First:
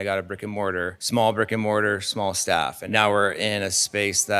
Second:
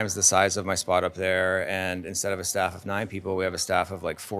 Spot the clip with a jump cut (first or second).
first